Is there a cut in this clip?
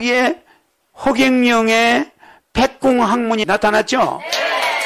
yes; 1 cut; at 3.4 s

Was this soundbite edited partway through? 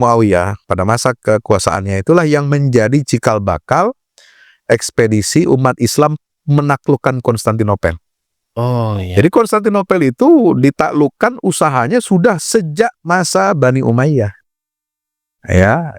no; 0 cuts

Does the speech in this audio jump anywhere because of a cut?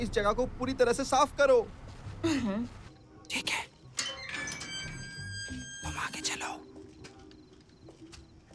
yes; 1 cut; at 3.0 s

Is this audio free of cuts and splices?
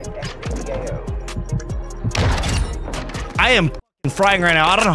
no; 1 cut; at 3.3 s

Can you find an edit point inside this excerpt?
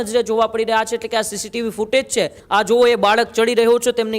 yes; 1 cut; at 2.4 s

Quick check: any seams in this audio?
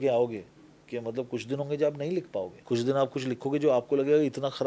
yes; 1 cut; at 2.6 s

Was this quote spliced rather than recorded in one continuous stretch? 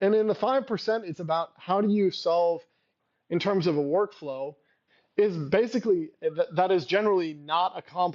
yes; 1 cut; at 2.9 s

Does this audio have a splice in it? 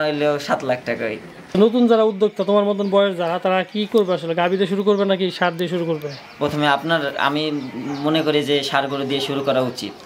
yes; 1 cut; at 1.6 s

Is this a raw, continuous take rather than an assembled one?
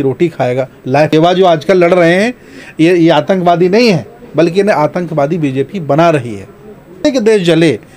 no; 2 cuts; at 1.1 s, 7.0 s

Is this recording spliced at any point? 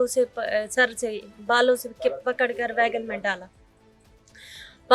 no; 0 cuts

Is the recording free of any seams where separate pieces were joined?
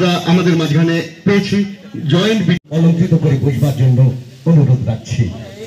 no; 1 cut; at 2.6 s

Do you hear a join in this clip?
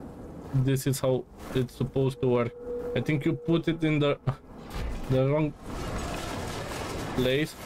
no; 0 cuts

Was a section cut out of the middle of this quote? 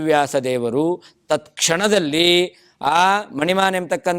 no; 0 cuts

